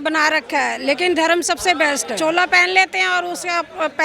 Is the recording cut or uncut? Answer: cut